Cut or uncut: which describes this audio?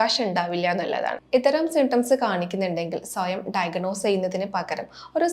cut